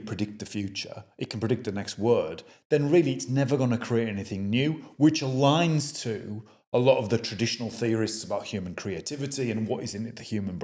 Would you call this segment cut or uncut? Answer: uncut